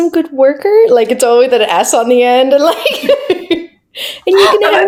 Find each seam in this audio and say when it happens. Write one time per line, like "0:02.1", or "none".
none